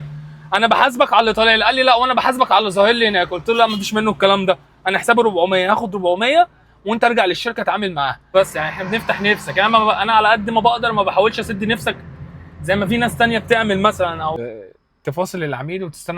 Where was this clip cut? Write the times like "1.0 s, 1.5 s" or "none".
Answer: 8.3 s, 14.4 s